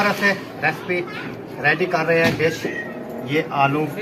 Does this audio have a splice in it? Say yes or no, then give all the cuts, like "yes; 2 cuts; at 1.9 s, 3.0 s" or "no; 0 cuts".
no; 0 cuts